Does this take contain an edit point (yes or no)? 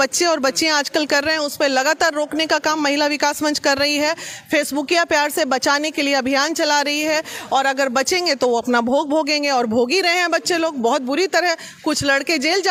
no